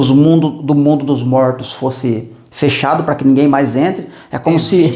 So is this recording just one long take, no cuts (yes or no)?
yes